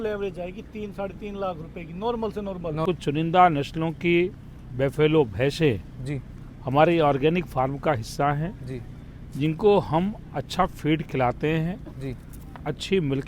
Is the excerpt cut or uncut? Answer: cut